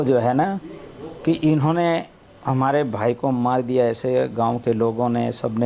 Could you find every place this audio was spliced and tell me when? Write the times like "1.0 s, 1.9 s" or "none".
none